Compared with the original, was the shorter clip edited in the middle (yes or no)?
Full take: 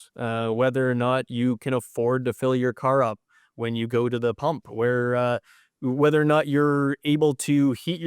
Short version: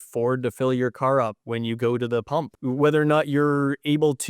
yes